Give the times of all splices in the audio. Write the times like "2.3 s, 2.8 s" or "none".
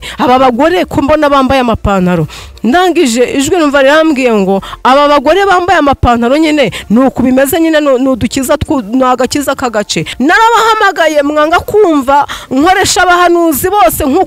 10.1 s

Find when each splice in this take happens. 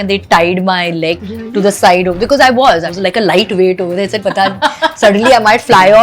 1.2 s, 2.9 s

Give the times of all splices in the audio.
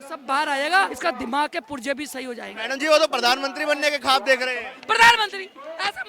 0.9 s, 2.5 s

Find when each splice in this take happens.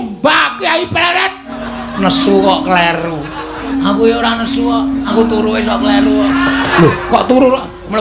1.6 s, 3.7 s, 5.1 s, 6.7 s

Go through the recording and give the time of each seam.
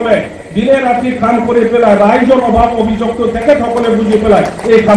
none

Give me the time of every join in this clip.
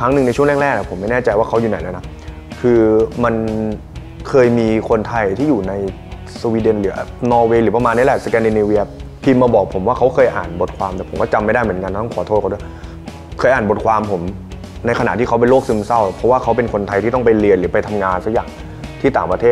none

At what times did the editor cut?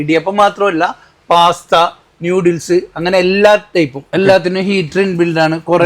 4.0 s

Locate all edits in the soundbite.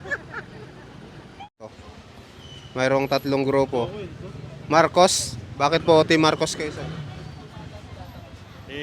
1.7 s

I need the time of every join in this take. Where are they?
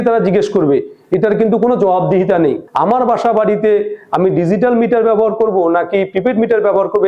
2.6 s

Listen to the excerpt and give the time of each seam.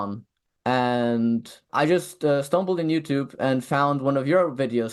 1.7 s

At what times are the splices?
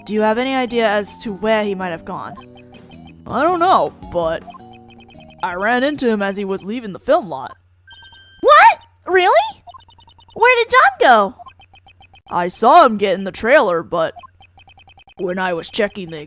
13.6 s

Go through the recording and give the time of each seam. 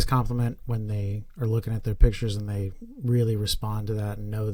none

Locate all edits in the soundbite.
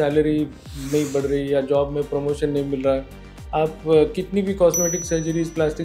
3.2 s

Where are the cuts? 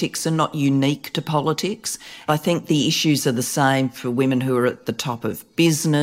2.3 s

